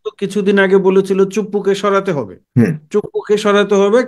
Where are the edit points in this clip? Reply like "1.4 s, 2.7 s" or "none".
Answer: 2.4 s